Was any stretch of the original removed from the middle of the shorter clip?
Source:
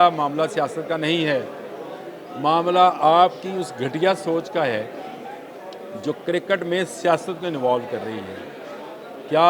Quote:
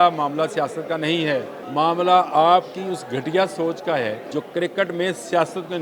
yes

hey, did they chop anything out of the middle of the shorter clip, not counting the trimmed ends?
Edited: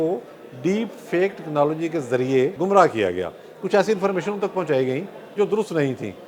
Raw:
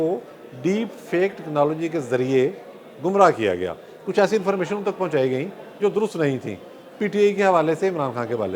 yes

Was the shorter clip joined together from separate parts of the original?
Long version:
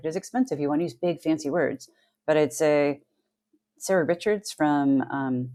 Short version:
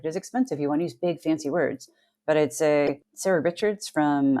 yes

